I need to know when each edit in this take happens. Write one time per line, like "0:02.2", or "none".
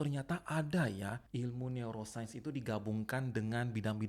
0:01.2